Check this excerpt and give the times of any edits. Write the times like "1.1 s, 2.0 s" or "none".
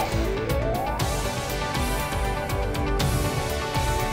none